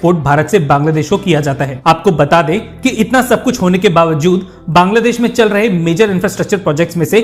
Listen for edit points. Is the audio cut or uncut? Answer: cut